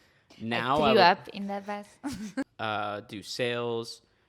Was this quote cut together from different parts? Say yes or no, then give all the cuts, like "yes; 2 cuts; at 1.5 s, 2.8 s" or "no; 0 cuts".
yes; 1 cut; at 2.5 s